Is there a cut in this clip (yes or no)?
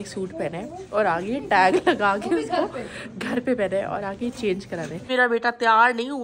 yes